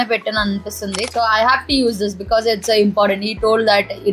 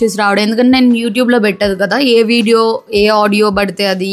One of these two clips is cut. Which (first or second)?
first